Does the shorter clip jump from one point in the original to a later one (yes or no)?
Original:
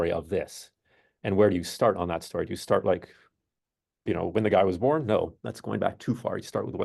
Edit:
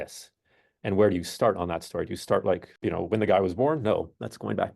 yes